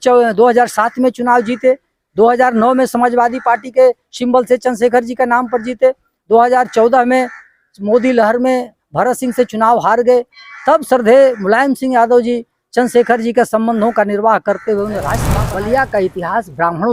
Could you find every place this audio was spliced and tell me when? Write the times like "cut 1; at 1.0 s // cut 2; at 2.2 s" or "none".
cut 1; at 15.3 s